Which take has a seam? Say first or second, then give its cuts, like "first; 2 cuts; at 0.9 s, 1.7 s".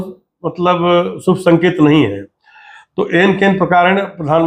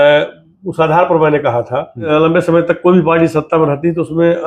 second; 1 cut; at 2.0 s